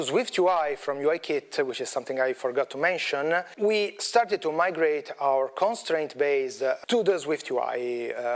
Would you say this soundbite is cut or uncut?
cut